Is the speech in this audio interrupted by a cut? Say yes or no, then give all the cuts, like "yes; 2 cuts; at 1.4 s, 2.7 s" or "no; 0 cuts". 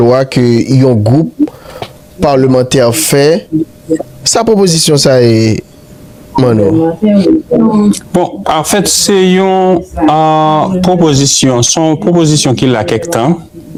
no; 0 cuts